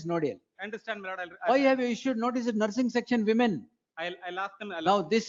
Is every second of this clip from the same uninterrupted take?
yes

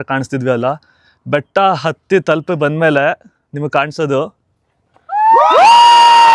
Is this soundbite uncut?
yes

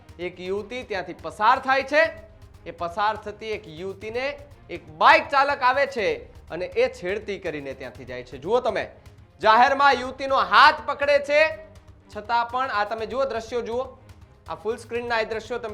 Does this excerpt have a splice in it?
no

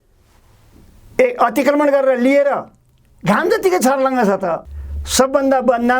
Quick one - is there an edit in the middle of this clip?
yes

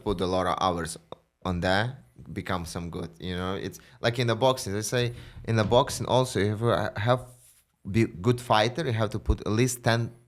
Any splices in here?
no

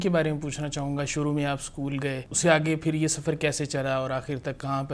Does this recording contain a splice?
yes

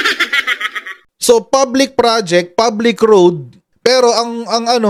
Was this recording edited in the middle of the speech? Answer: no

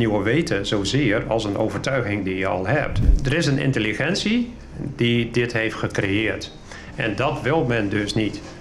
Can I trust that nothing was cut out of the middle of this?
no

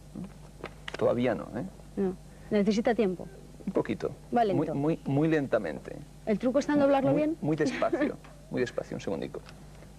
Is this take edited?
no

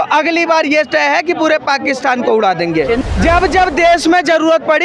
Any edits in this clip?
yes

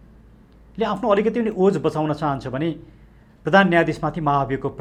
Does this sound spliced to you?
no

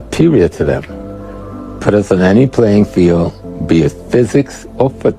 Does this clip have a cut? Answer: no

